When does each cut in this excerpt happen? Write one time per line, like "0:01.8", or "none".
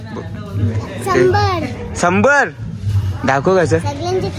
none

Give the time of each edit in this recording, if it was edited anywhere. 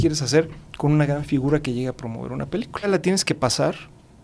0:02.9

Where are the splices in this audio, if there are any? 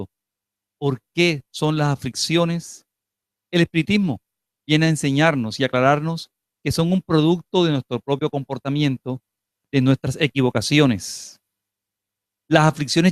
none

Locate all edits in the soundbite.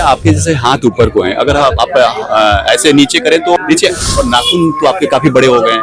0:03.6

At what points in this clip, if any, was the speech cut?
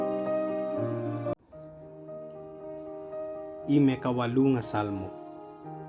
0:01.3
0:03.7

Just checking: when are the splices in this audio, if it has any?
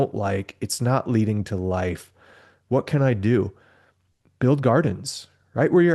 none

